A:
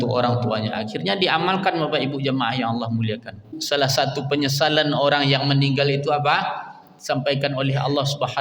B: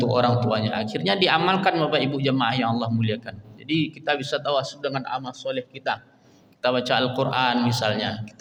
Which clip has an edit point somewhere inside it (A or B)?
A